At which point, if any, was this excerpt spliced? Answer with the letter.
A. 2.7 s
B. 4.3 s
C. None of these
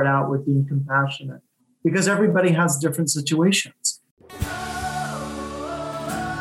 B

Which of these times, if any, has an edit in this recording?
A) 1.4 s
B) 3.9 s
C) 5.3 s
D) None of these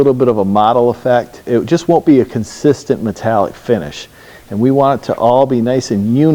A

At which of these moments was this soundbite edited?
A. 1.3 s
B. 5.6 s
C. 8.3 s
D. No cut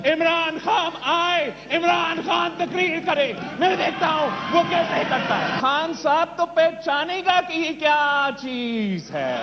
B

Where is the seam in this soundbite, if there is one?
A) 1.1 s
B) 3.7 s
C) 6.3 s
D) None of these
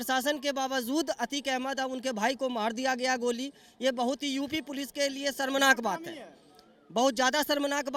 D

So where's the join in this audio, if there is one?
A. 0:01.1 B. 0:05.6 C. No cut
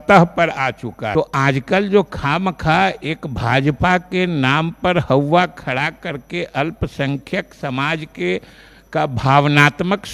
A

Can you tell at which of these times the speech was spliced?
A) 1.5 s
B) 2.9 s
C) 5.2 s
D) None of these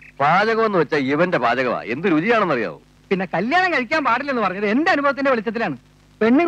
B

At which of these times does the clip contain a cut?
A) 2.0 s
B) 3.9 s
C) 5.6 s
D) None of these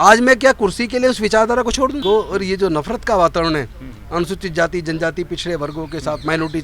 A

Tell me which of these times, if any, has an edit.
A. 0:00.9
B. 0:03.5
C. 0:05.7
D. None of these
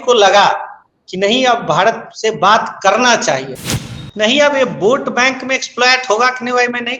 B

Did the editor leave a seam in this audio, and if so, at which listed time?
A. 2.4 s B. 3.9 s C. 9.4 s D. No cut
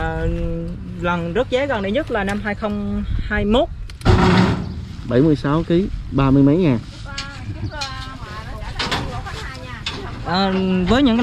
B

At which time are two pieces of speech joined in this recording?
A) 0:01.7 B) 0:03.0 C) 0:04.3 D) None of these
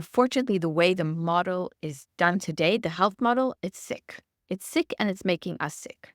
A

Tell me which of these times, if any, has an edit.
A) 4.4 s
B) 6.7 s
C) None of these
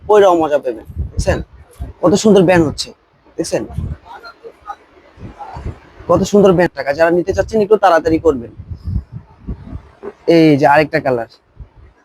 B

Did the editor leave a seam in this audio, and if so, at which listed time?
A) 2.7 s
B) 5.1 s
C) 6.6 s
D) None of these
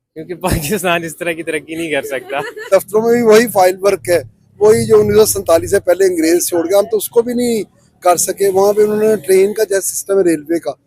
A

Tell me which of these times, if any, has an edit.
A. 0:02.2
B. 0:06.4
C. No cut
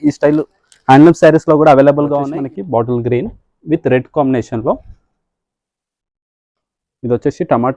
A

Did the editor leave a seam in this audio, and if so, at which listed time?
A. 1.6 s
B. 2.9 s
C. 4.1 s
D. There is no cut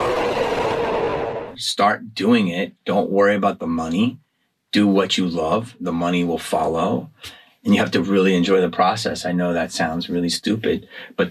A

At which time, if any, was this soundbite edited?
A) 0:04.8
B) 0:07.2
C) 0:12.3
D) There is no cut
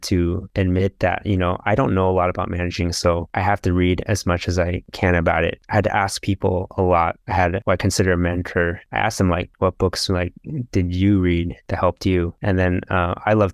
D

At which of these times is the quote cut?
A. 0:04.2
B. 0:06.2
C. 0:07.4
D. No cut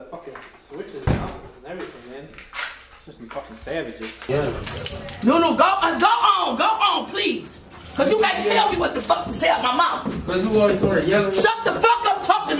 A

